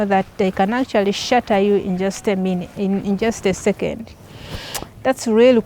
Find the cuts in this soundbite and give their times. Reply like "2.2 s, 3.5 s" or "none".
none

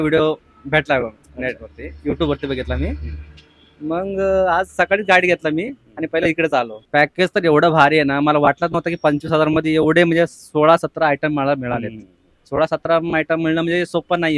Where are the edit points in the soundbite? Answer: 6.8 s

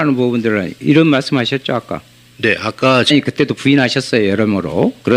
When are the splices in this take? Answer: none

